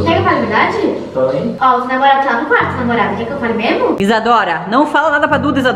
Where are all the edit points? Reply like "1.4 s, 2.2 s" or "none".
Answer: 1.5 s, 4.0 s